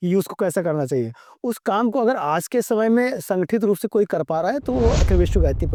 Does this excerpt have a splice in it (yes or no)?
no